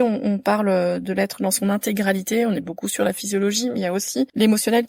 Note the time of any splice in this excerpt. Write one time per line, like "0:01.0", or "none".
none